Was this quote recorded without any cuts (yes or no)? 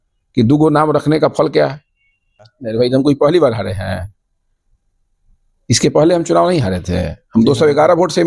no